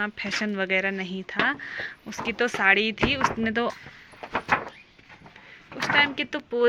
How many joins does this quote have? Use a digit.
1